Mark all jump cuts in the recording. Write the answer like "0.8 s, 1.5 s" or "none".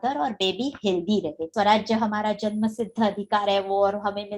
1.5 s